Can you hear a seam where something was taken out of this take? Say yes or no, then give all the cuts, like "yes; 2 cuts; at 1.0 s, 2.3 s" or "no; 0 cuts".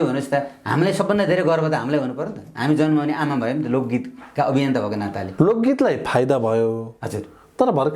yes; 1 cut; at 5.2 s